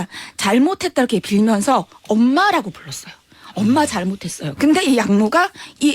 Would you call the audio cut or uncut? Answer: cut